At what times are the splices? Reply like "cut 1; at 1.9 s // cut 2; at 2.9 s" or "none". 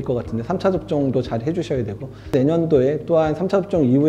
cut 1; at 2.3 s